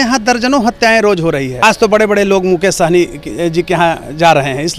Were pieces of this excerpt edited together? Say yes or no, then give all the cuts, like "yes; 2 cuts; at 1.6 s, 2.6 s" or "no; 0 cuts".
yes; 1 cut; at 1.5 s